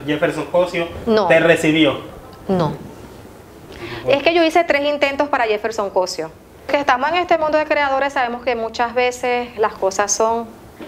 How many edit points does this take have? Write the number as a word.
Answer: one